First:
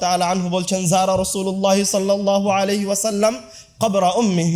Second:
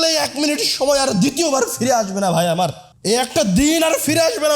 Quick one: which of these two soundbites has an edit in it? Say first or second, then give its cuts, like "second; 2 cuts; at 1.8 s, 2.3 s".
second; 1 cut; at 2.9 s